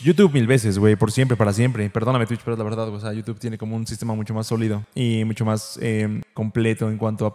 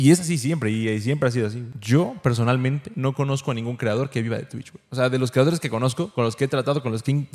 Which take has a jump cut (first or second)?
second